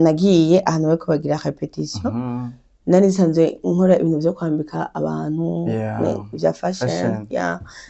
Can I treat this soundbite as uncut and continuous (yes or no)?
yes